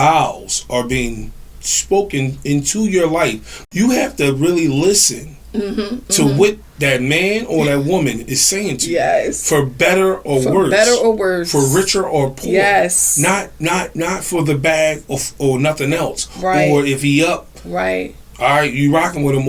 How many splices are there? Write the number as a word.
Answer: one